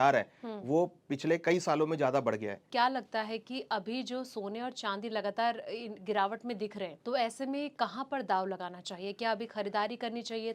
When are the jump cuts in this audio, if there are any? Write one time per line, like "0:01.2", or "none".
0:02.6
0:07.0